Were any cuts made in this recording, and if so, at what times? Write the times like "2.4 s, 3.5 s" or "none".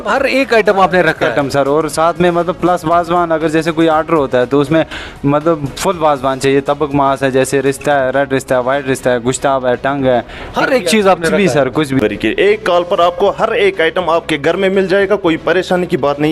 12.0 s